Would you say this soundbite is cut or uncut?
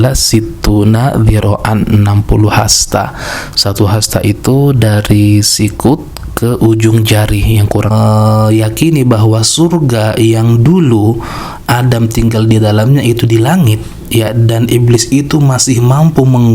cut